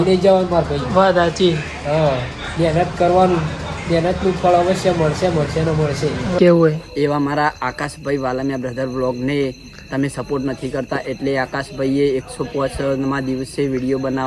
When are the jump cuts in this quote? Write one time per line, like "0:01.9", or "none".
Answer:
0:06.4